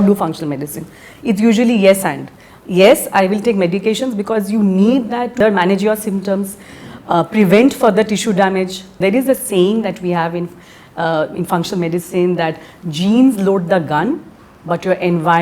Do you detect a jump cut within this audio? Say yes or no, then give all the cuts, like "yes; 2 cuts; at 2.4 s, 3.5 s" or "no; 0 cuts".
yes; 1 cut; at 8.9 s